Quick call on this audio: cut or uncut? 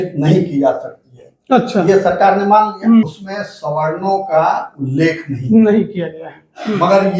cut